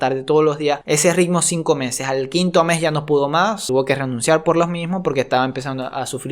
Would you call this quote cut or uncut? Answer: cut